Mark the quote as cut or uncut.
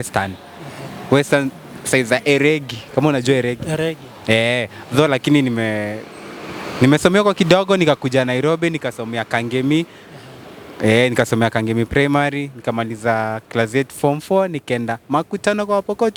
uncut